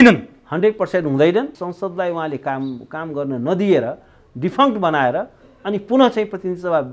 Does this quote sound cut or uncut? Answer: cut